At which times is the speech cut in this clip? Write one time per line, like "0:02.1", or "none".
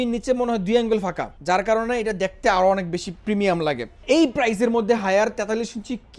0:01.3
0:04.0